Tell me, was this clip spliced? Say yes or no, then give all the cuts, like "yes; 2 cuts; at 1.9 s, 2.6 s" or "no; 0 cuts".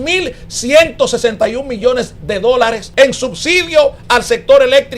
yes; 1 cut; at 2.8 s